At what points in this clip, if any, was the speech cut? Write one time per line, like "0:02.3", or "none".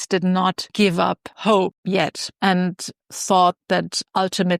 0:01.9